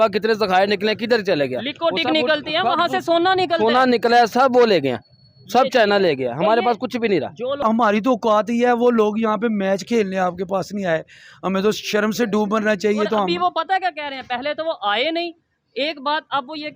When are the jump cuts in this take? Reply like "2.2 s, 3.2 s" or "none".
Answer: 7.6 s